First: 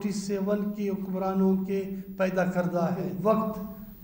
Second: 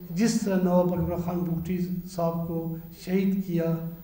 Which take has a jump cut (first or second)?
first